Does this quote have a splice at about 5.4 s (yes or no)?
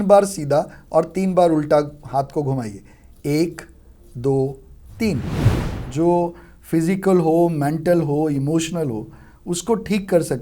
yes